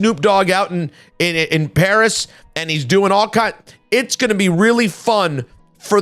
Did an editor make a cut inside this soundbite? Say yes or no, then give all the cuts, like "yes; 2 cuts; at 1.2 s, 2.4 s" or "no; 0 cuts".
no; 0 cuts